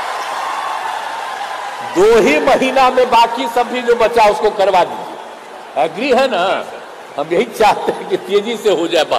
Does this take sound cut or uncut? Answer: uncut